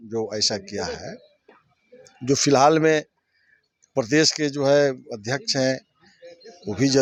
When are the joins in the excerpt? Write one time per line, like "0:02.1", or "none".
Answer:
none

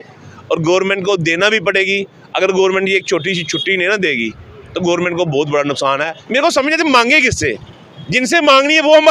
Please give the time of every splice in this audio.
0:06.1

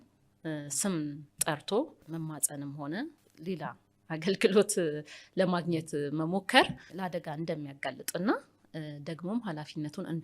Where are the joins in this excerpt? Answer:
0:02.0
0:03.3
0:06.9

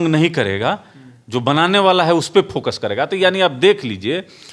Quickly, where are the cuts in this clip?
none

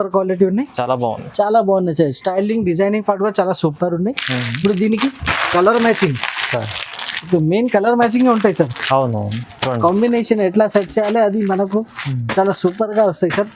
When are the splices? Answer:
none

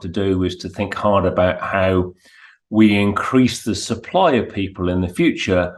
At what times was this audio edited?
none

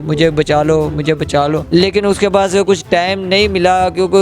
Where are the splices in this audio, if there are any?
0:01.6

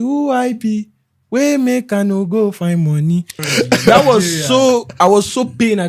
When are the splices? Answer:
0:03.4

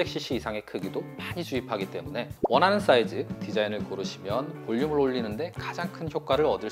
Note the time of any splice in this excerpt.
none

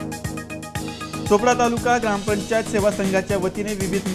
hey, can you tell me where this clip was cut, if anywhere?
none

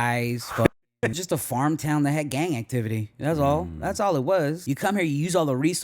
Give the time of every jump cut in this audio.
0:01.1
0:04.6

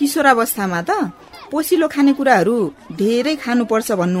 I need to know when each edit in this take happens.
none

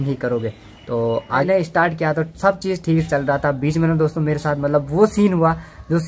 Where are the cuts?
0:01.4

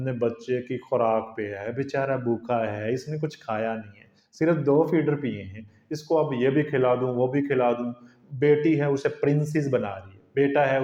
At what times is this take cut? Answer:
none

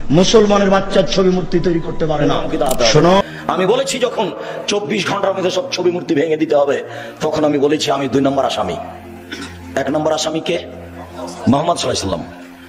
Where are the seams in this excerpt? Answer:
0:03.2

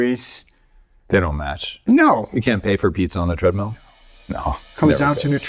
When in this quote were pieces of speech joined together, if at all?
none

